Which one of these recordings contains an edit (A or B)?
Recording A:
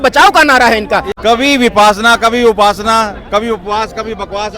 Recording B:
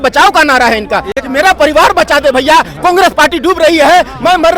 A